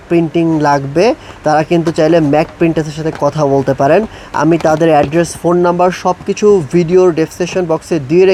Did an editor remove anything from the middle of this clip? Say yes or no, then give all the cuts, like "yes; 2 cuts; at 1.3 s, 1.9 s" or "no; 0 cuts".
no; 0 cuts